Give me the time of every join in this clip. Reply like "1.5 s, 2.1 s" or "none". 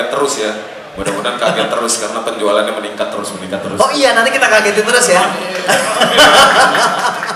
none